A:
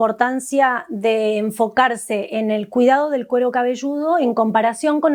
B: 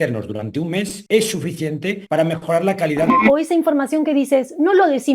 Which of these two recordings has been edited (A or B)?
B